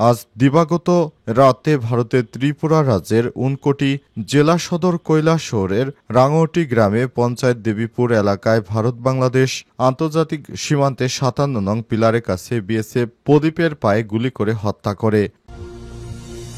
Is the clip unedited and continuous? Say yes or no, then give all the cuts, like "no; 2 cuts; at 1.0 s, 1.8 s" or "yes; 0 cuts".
no; 1 cut; at 15.4 s